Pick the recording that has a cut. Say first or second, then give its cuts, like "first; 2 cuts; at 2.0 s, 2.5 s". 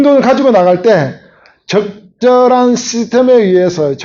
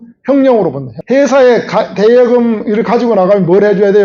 second; 1 cut; at 0.9 s